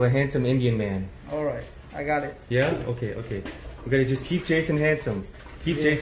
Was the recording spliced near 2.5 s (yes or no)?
no